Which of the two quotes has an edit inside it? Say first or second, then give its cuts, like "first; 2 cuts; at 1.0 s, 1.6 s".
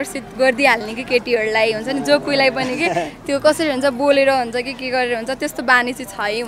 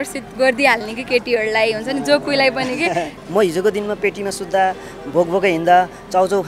second; 1 cut; at 3.2 s